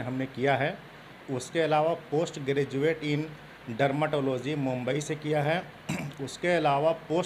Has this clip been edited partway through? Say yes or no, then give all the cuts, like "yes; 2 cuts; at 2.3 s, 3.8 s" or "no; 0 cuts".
no; 0 cuts